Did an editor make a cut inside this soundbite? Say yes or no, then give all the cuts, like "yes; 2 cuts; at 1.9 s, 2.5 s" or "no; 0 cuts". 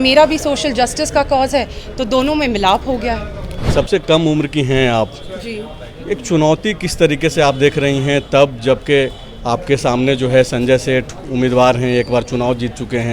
yes; 1 cut; at 3.6 s